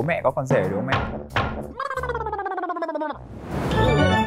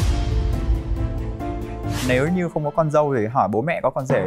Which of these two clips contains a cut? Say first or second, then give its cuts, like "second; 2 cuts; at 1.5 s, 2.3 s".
second; 1 cut; at 2.0 s